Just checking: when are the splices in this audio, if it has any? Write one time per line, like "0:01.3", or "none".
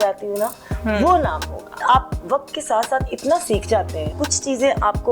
0:01.8
0:04.1